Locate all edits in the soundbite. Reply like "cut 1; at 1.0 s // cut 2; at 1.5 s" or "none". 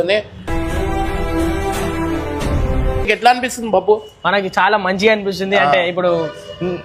cut 1; at 3.1 s